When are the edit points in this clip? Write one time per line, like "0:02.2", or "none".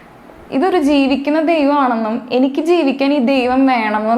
none